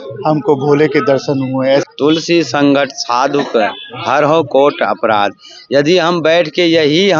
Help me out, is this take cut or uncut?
cut